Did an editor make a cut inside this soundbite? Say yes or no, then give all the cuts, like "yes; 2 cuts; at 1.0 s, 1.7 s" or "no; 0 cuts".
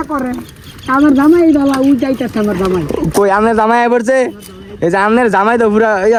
no; 0 cuts